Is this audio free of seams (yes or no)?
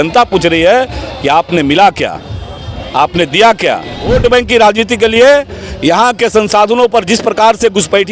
no